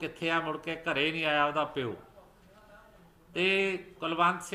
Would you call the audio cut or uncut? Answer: uncut